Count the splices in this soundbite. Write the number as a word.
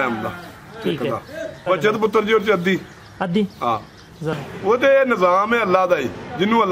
two